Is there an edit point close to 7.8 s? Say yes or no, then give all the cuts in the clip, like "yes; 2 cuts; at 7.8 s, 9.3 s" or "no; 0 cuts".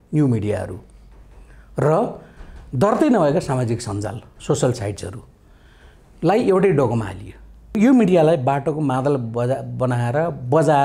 yes; 1 cut; at 7.8 s